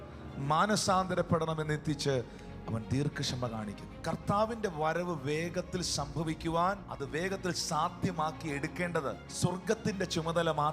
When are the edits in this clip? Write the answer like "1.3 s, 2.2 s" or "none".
3.9 s, 6.9 s, 9.3 s